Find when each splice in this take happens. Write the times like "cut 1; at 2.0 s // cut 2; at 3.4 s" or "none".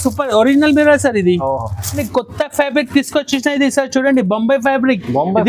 cut 1; at 2.0 s

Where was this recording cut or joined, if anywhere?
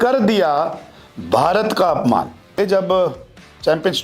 cut 1; at 2.6 s

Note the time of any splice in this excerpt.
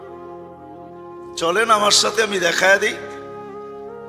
cut 1; at 2.9 s

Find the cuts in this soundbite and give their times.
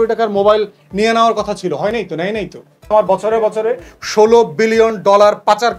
cut 1; at 2.7 s

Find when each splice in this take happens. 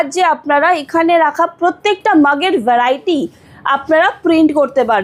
none

